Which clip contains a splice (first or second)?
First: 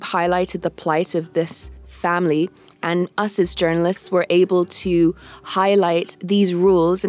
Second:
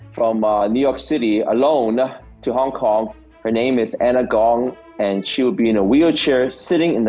second